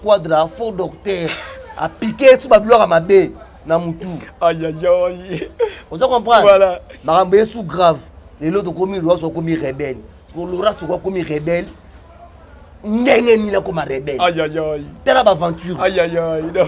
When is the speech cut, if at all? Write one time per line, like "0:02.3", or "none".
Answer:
none